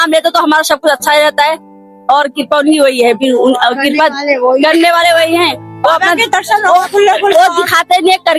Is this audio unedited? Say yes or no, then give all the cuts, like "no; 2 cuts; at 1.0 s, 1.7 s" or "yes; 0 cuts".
yes; 0 cuts